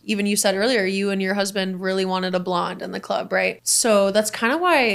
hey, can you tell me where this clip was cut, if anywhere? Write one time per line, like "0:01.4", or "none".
0:03.5